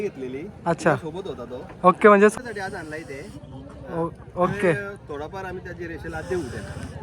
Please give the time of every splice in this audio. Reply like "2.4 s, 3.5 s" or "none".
2.3 s